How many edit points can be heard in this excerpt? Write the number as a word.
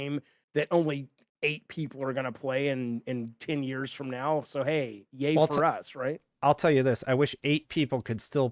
zero